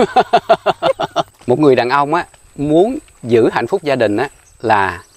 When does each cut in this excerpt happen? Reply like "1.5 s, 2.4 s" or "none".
1.3 s

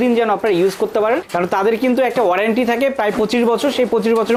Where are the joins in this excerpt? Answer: none

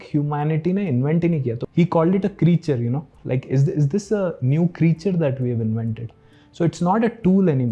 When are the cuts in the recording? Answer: 1.6 s

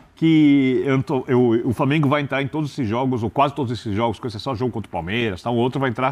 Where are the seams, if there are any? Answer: none

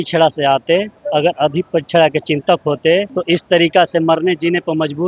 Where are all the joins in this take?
3.1 s

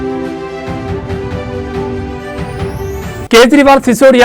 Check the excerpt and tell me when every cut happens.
none

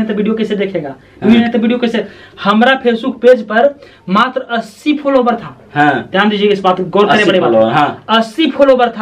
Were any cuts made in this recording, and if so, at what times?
1.4 s

